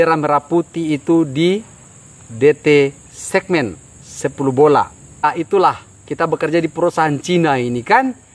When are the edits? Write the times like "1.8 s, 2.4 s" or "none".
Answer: 5.2 s